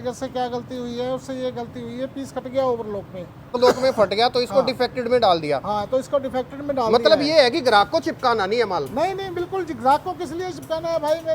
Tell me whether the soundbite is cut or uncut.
cut